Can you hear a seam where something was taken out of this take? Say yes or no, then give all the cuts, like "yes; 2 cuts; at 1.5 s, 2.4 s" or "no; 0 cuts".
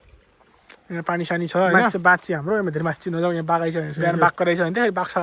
yes; 2 cuts; at 1.9 s, 3.9 s